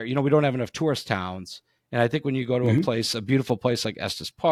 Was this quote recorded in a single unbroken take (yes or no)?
yes